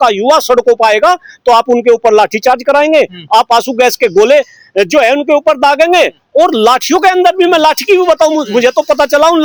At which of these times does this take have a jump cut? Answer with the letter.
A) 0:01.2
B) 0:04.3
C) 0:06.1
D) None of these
D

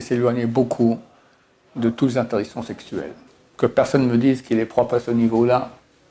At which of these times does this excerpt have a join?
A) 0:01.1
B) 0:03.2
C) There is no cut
B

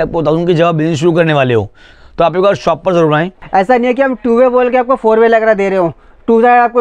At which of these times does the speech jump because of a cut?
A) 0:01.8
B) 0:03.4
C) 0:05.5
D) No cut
B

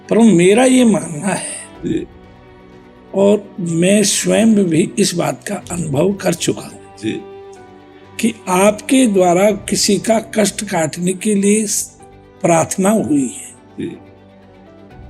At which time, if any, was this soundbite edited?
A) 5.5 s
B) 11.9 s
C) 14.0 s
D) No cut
C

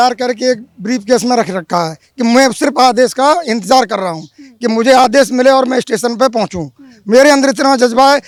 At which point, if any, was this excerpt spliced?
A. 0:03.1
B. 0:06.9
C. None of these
C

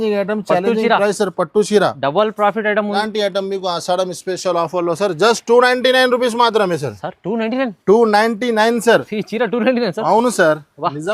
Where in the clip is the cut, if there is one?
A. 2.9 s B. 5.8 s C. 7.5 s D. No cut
A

